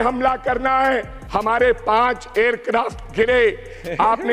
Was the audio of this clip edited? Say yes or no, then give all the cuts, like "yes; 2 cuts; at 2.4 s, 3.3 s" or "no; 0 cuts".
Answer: yes; 1 cut; at 1.2 s